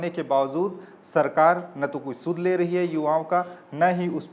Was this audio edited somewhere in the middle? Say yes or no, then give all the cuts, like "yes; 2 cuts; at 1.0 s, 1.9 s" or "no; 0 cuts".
no; 0 cuts